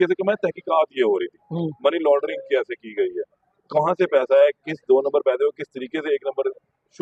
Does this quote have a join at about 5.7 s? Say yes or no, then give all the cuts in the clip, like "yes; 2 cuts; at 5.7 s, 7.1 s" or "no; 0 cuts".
no; 0 cuts